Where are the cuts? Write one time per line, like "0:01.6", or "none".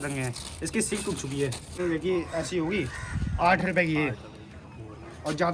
0:01.8